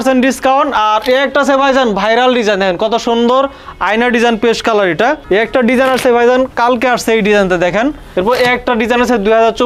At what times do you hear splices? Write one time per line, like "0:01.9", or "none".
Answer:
0:05.2
0:08.0